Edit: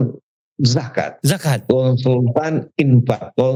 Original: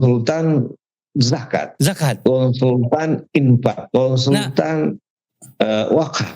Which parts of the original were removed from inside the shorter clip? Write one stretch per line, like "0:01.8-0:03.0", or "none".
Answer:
none